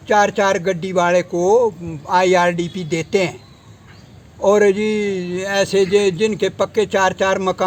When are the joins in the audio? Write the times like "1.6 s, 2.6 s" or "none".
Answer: none